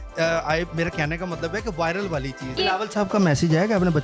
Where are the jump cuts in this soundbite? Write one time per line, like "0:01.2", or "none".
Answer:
0:02.6